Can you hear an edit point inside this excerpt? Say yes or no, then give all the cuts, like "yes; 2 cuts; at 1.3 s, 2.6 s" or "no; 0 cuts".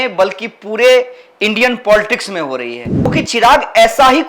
yes; 1 cut; at 3.1 s